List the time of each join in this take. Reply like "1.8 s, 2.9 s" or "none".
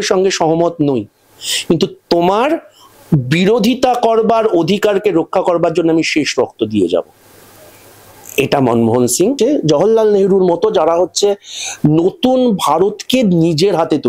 9.4 s